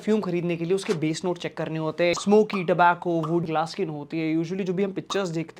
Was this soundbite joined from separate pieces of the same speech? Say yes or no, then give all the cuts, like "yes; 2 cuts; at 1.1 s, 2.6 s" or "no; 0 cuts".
yes; 2 cuts; at 2.1 s, 3.4 s